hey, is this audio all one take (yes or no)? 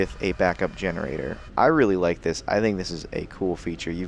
no